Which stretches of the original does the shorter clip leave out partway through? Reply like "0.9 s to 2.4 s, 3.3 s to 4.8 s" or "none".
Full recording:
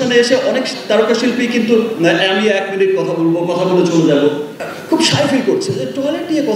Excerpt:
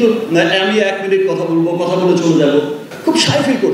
4.5 s to 4.7 s